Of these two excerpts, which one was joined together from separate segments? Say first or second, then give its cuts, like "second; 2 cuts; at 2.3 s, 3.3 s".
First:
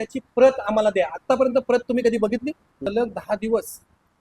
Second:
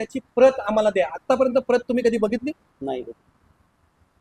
first; 1 cut; at 2.9 s